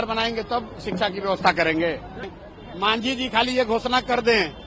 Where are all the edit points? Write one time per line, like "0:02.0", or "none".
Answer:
0:02.3